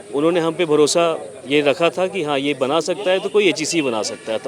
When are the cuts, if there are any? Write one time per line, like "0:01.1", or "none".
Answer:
none